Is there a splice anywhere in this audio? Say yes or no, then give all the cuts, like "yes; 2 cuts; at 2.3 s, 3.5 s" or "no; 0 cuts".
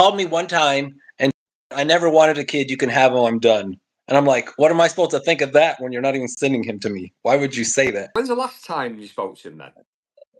yes; 1 cut; at 8.0 s